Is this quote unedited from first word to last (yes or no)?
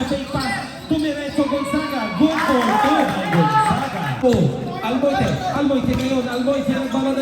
no